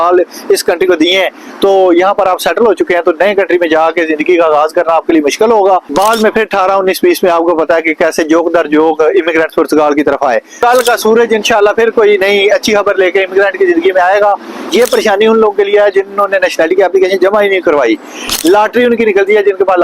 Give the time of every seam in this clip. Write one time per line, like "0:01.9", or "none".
0:05.9
0:10.6
0:14.7